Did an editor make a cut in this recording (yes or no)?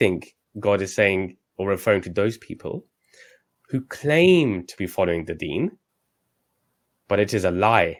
no